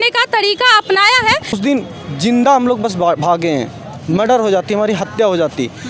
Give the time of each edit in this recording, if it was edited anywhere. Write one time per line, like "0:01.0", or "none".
0:01.6